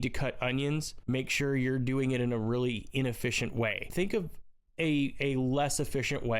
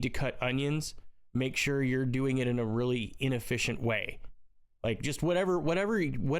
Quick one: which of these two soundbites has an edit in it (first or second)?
first